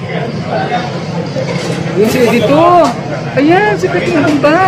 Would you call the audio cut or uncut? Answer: uncut